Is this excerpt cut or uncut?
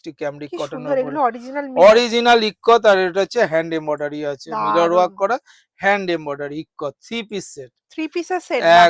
uncut